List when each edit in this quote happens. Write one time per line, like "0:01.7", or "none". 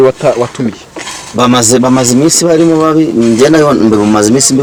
none